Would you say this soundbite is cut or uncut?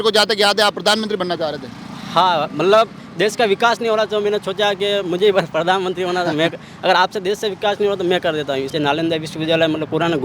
cut